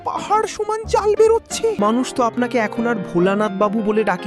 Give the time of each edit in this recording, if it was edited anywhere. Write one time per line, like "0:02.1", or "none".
0:01.7